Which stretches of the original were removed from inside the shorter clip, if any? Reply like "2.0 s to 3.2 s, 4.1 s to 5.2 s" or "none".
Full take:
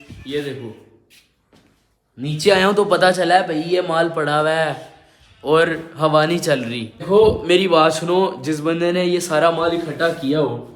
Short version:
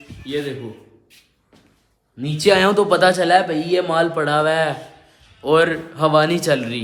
none